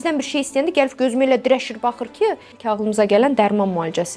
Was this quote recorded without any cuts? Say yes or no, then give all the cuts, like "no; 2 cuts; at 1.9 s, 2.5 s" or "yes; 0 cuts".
no; 1 cut; at 2.7 s